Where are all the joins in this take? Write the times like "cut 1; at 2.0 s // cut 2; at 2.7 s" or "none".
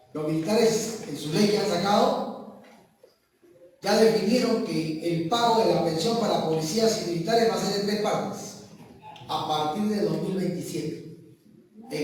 none